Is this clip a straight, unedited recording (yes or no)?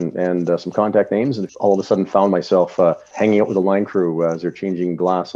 no